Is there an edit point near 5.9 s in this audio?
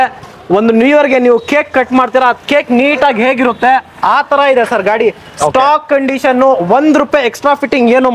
no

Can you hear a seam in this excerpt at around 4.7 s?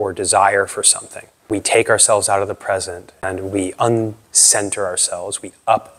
no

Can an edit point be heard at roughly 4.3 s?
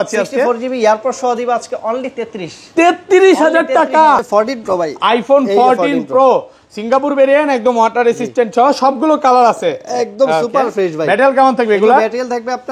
yes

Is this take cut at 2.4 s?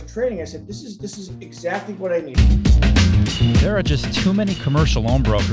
yes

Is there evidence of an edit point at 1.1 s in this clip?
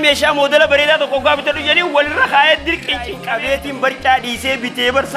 no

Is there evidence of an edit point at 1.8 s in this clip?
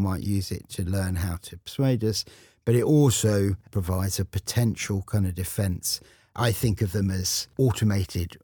no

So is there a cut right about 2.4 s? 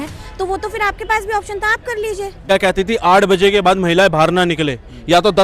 yes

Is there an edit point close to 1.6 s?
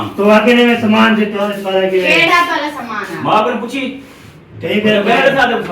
yes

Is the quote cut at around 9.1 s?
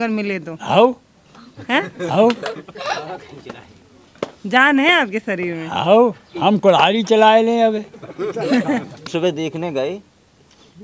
yes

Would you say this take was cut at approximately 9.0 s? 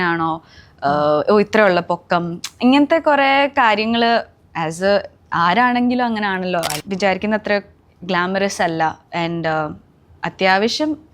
no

